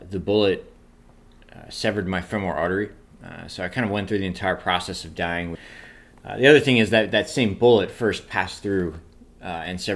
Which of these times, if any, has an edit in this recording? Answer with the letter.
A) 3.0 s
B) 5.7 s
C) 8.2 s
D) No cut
B